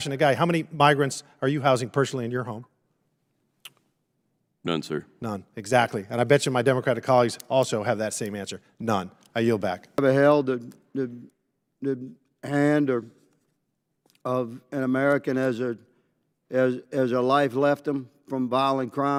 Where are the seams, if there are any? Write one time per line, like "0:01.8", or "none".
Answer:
none

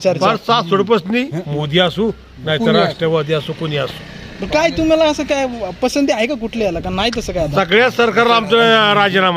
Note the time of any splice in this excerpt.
0:01.5

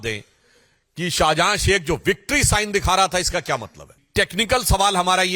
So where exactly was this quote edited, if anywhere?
0:04.0

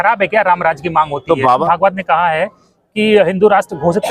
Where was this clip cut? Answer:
0:01.6

